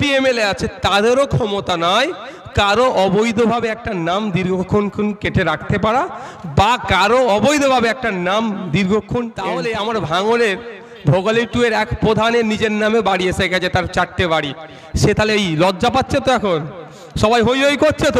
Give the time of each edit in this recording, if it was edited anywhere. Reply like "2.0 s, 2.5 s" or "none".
9.5 s